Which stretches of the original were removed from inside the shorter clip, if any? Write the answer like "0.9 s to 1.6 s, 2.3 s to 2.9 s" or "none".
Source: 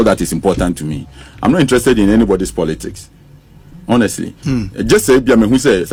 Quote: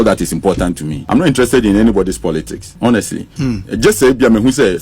0.9 s to 1.2 s, 2.9 s to 3.7 s